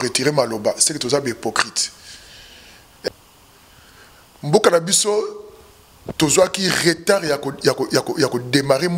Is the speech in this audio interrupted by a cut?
yes; 1 cut; at 3.1 s

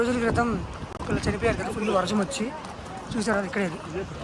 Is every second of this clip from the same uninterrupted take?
yes; 0 cuts

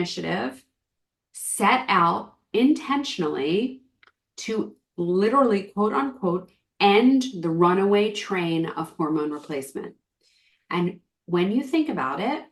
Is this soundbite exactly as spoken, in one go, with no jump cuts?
yes; 0 cuts

